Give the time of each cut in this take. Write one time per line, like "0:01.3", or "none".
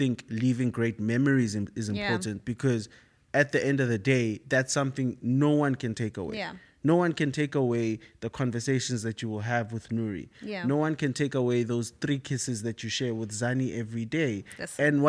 none